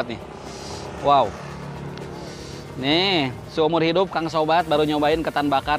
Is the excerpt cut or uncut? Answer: uncut